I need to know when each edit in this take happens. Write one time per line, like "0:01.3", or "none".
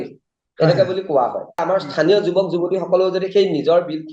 0:01.6